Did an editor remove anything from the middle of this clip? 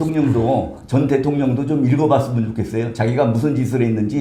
no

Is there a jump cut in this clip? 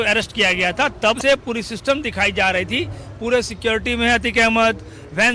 yes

